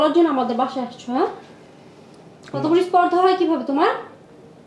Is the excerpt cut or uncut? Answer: uncut